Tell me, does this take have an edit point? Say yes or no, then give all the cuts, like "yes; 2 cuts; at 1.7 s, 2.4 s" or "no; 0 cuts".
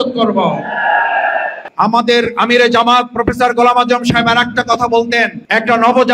yes; 1 cut; at 1.6 s